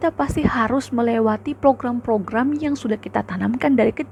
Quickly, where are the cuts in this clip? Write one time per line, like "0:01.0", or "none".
none

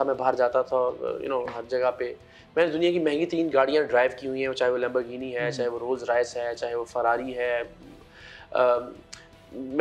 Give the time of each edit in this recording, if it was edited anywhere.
none

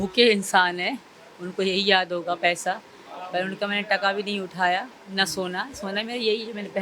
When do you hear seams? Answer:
none

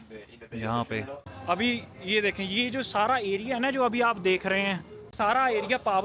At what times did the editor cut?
0:01.2
0:05.1

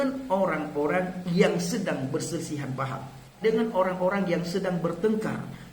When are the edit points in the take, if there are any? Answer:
0:03.4

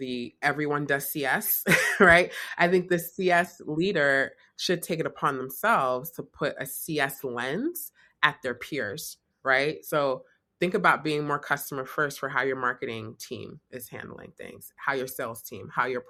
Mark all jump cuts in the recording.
none

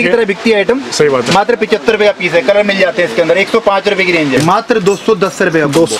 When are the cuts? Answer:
0:04.4

